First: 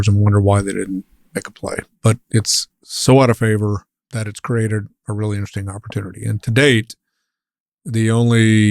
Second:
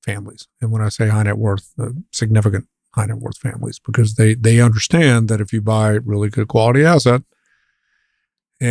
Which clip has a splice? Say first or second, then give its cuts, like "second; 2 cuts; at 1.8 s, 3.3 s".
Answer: first; 2 cuts; at 1.9 s, 4.0 s